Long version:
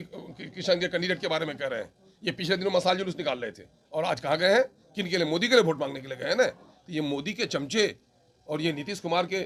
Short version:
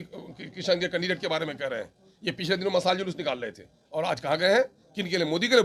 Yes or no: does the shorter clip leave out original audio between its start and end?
no